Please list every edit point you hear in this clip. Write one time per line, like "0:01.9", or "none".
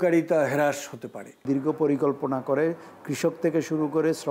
0:01.4